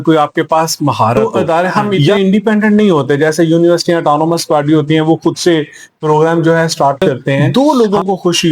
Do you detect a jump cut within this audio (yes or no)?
yes